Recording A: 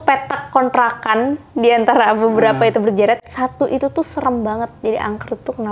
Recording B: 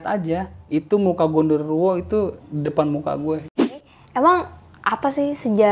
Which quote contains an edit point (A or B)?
B